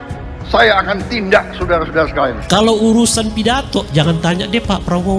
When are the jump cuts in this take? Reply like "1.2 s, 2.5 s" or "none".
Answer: 2.4 s